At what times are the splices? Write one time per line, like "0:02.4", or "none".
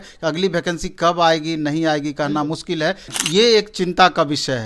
0:03.1